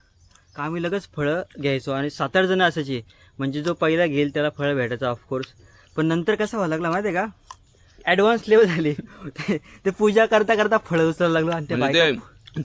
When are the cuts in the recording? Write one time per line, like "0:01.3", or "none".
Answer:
none